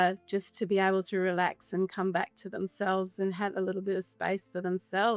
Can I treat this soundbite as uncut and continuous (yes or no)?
yes